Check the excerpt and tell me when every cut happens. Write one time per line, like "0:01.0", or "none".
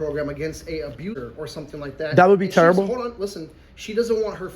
0:01.1